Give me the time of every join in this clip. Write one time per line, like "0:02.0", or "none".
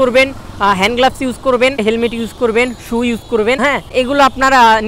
0:01.8
0:03.8